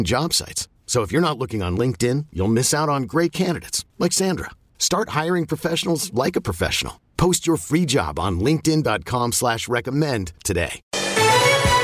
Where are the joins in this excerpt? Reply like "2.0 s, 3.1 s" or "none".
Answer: 10.9 s